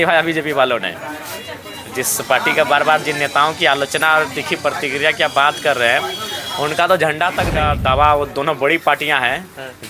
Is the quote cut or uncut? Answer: cut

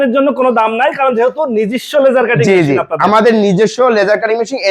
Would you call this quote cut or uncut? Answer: uncut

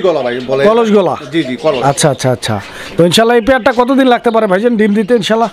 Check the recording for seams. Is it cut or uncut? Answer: uncut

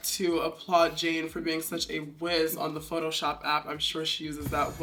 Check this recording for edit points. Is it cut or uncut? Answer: uncut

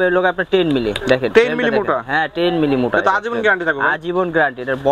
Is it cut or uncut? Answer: uncut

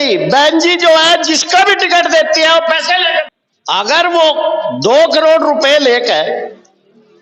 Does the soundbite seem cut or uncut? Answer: cut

